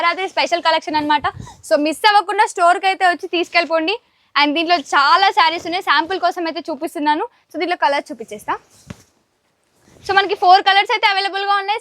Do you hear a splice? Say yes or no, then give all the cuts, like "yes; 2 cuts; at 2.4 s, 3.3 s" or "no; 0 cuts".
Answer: no; 0 cuts